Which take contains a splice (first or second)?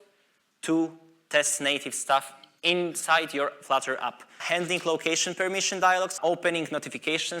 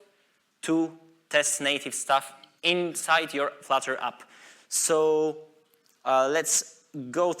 first